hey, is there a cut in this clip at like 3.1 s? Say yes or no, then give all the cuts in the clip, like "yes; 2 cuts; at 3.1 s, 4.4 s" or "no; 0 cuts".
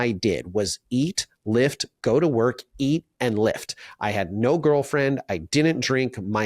no; 0 cuts